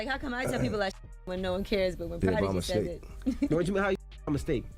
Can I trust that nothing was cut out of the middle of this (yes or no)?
yes